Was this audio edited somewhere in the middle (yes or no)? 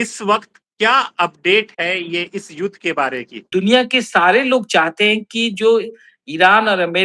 yes